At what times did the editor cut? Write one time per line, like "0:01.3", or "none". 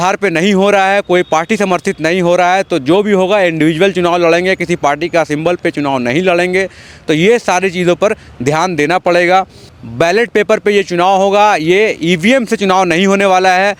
none